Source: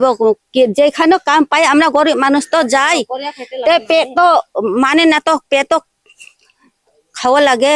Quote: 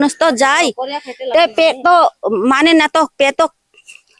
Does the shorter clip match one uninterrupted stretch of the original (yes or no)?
yes